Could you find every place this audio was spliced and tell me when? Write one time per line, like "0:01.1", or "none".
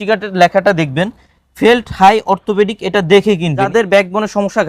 0:03.7